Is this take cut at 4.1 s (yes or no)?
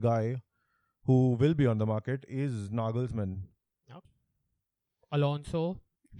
yes